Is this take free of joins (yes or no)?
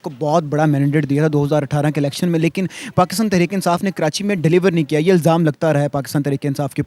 yes